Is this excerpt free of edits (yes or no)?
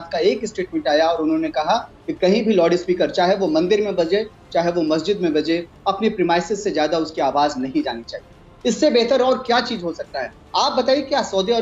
yes